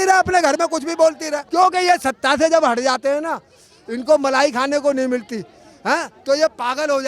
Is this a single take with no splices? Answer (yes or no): no